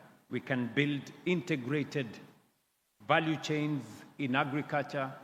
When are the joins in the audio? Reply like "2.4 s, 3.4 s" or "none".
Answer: none